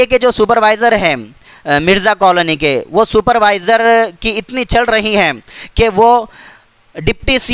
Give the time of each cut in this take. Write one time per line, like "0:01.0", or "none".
none

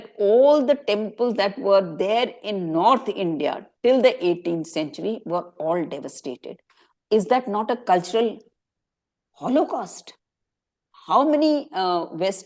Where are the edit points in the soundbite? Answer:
none

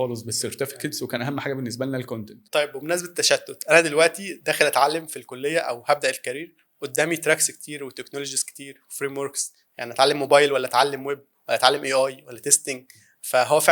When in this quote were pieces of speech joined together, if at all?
0:02.3

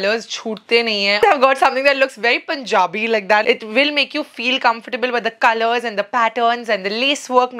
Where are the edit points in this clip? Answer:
0:01.2
0:03.4

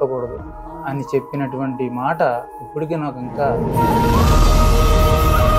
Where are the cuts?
0:03.6

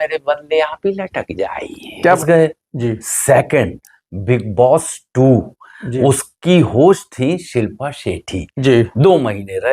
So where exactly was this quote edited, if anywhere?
0:02.2

